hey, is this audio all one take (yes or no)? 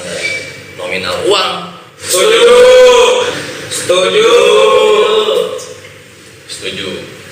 no